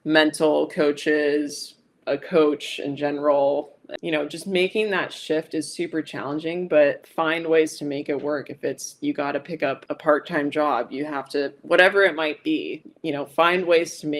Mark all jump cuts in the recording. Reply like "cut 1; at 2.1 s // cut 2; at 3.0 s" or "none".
cut 1; at 3.9 s